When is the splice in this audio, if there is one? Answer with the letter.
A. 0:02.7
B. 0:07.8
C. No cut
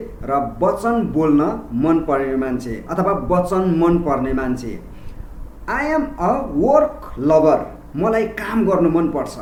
C